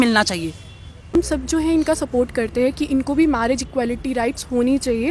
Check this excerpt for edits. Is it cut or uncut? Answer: cut